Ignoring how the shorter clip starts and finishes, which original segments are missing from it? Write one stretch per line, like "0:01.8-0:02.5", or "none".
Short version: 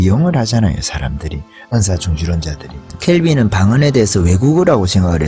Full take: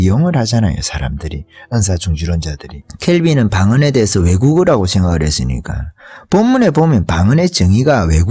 none